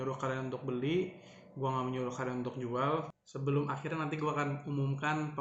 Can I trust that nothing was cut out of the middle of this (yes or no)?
no